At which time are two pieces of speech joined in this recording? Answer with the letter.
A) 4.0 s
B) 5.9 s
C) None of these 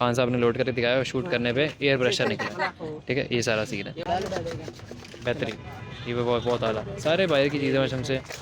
A